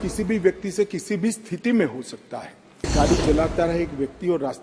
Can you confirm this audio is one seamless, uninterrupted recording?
no; 1 cut; at 2.9 s

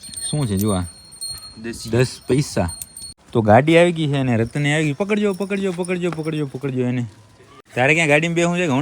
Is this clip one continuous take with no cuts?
no; 2 cuts; at 3.2 s, 7.6 s

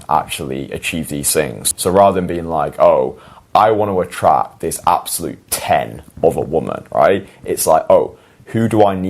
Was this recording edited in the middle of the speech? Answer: yes; 1 cut; at 1.6 s

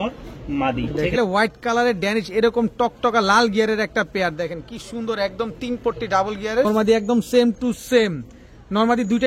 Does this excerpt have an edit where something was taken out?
yes; 2 cuts; at 1.2 s, 6.6 s

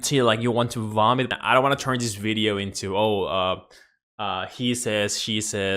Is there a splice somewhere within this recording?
yes; 1 cut; at 1.3 s

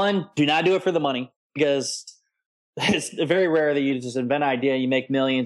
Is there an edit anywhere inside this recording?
no; 0 cuts

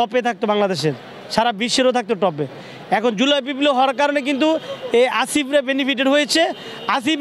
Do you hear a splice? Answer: no; 0 cuts

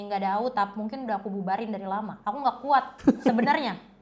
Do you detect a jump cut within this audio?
yes; 2 cuts; at 2.1 s, 2.9 s

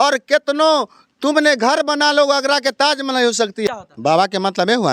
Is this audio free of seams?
no; 1 cut; at 3.7 s

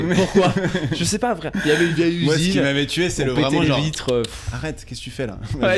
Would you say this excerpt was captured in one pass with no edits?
yes; 0 cuts

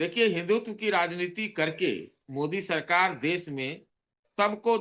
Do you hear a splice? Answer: no; 0 cuts

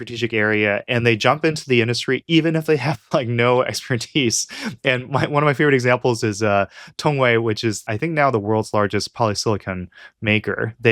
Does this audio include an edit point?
yes; 1 cut; at 7.8 s

